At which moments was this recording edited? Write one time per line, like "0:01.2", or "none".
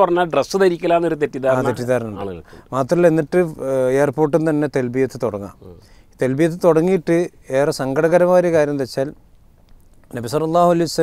none